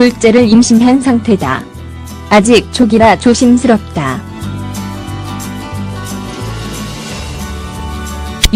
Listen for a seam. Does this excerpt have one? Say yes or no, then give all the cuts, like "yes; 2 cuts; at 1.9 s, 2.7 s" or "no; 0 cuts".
yes; 1 cut; at 1.0 s